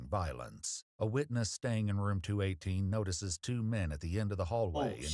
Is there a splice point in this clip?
no; 0 cuts

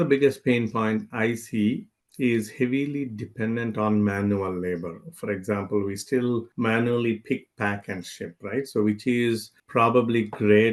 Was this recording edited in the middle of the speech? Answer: no; 0 cuts

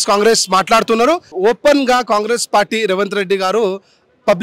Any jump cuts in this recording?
yes; 1 cut; at 1.3 s

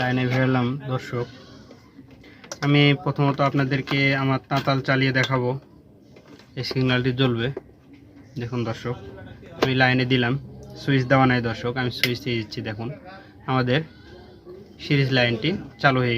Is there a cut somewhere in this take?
yes; 1 cut; at 6.3 s

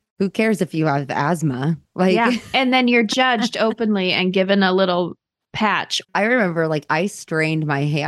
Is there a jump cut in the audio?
yes; 1 cut; at 6.1 s

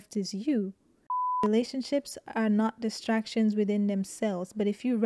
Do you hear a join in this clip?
yes; 1 cut; at 1.4 s

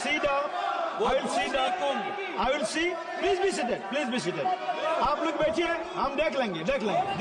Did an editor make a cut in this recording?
no; 0 cuts

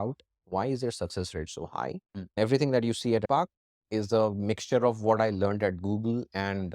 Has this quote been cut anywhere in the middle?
yes; 2 cuts; at 2.3 s, 3.2 s

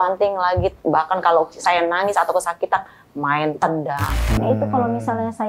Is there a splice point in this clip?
yes; 1 cut; at 4.1 s

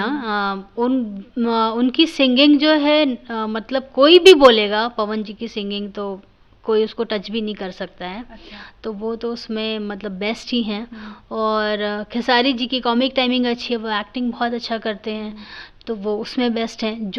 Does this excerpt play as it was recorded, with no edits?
yes; 0 cuts

